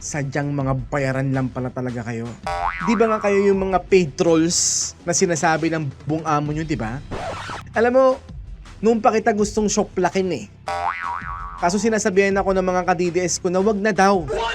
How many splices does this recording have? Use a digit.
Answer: 1